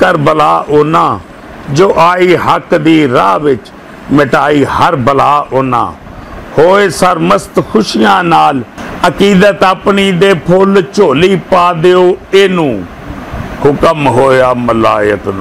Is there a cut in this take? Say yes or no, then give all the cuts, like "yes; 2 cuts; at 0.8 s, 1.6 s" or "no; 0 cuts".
yes; 1 cut; at 8.8 s